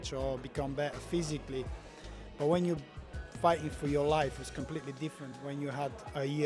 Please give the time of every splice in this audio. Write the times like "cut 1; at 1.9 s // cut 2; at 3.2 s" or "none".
cut 1; at 5.3 s